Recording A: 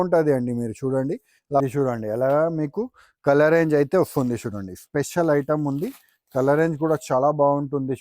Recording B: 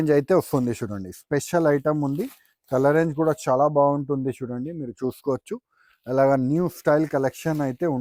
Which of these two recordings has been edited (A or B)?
A